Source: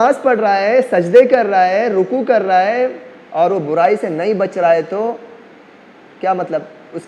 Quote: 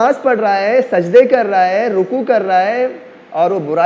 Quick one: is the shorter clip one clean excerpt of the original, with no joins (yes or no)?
yes